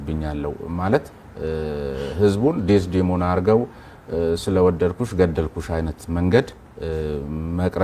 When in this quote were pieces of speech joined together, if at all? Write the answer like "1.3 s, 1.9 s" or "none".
none